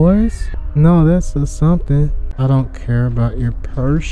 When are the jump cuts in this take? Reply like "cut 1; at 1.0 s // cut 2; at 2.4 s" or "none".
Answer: cut 1; at 2.2 s